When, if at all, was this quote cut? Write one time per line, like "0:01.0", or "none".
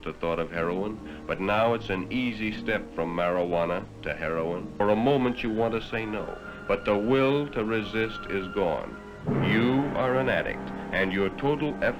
0:04.8
0:09.1